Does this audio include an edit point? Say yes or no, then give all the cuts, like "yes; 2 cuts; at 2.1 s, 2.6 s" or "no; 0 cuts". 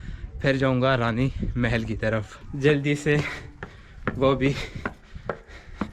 yes; 1 cut; at 2.4 s